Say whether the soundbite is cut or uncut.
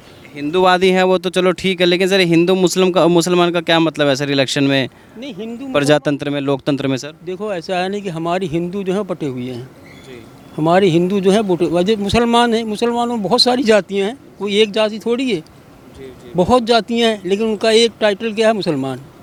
uncut